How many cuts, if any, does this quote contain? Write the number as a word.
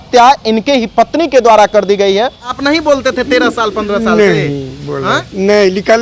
one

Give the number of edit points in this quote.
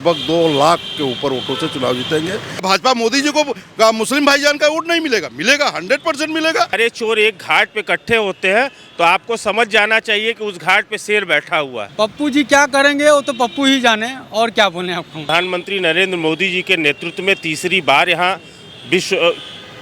four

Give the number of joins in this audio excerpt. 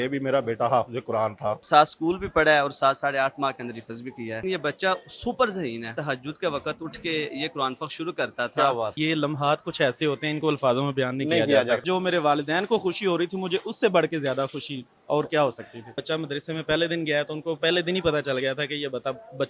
six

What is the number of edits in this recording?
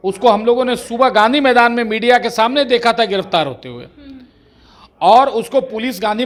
zero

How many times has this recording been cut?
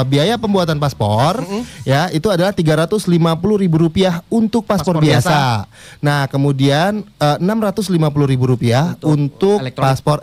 zero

